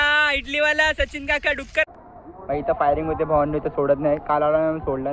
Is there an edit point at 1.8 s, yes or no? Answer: yes